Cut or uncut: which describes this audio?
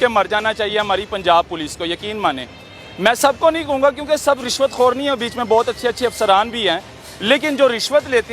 uncut